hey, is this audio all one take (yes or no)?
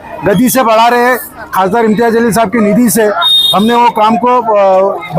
no